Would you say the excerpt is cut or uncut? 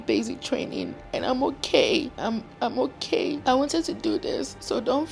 uncut